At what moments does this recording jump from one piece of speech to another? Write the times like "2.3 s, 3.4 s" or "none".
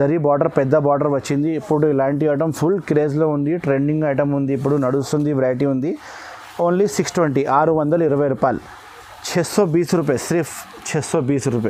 none

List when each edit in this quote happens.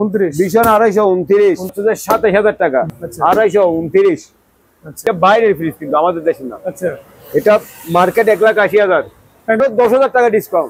1.8 s, 5.0 s, 9.6 s

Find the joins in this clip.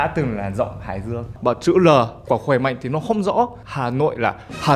1.3 s, 3.6 s

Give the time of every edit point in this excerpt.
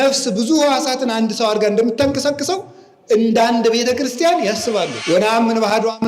5.0 s

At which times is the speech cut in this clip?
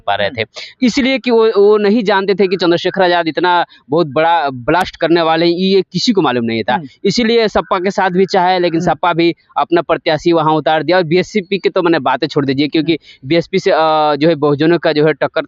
none

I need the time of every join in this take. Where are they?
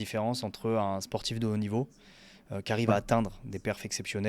none

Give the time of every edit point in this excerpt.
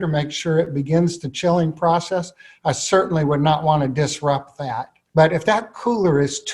4.9 s

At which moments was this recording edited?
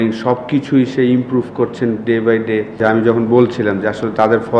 2.8 s

